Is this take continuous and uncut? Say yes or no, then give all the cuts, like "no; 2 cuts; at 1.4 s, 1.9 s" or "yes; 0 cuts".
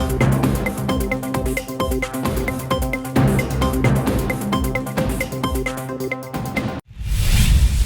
no; 1 cut; at 6.8 s